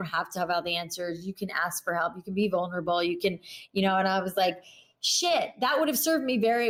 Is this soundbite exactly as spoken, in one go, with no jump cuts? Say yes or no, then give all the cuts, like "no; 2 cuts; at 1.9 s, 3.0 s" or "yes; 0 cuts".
yes; 0 cuts